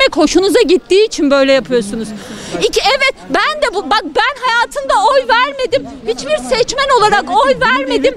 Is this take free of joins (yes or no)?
yes